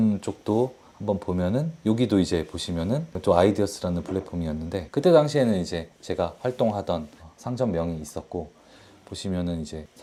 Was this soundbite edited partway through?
no; 0 cuts

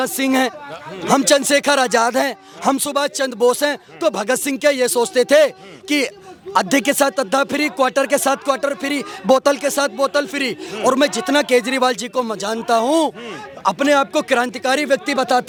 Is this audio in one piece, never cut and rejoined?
yes; 0 cuts

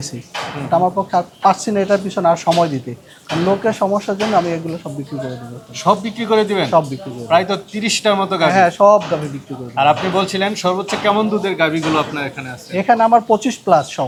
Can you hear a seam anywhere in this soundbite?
no; 0 cuts

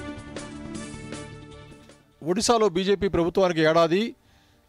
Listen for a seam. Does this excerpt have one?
yes; 1 cut; at 1.6 s

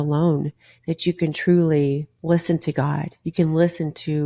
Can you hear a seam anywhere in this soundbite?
yes; 1 cut; at 2.1 s

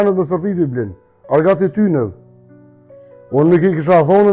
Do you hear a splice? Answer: no; 0 cuts

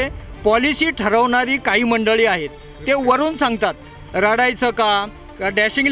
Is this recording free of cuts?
yes; 0 cuts

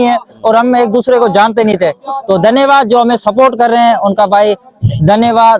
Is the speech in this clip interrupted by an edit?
no; 0 cuts

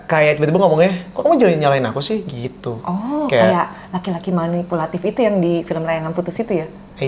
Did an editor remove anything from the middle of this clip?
no; 0 cuts

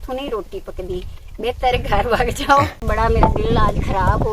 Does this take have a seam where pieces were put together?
yes; 1 cut; at 2.9 s

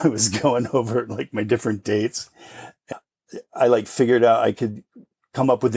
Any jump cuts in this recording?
no; 0 cuts

